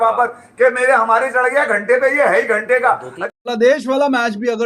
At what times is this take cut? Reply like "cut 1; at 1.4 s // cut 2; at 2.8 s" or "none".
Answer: cut 1; at 3.1 s